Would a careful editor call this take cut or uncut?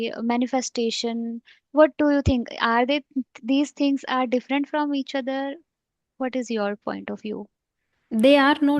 uncut